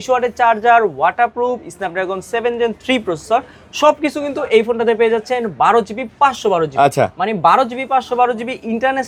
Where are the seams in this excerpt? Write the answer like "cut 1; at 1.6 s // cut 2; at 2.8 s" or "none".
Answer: none